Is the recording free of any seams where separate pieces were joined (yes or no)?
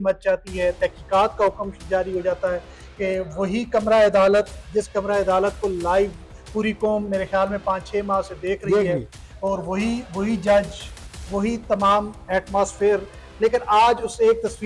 yes